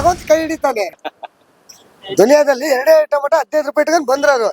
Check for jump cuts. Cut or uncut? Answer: cut